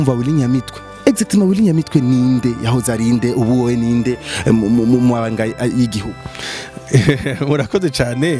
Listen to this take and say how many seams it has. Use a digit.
0